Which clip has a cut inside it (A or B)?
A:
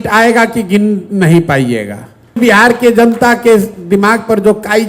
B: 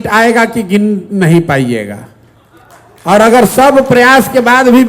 A